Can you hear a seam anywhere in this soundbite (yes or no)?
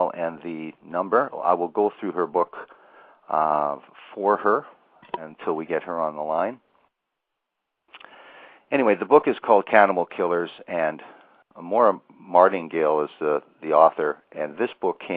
yes